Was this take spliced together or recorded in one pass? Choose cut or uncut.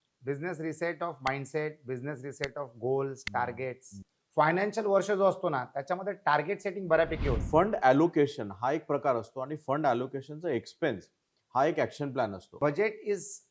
cut